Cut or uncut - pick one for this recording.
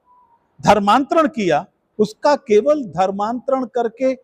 cut